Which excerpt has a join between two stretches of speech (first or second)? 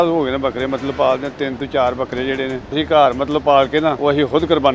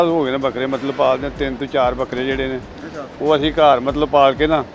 first